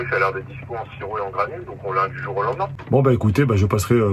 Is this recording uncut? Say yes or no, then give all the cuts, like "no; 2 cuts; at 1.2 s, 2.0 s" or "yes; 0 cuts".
no; 1 cut; at 2.8 s